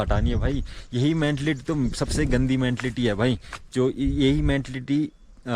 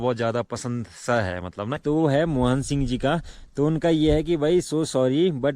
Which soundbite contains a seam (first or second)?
second